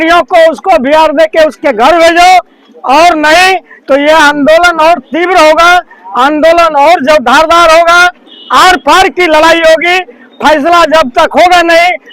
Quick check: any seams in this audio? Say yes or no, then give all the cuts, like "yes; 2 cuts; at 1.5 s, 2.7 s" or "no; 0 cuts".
no; 0 cuts